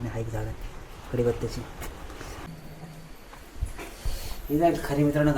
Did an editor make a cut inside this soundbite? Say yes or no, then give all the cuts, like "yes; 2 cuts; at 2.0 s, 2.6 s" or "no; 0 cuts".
yes; 1 cut; at 2.5 s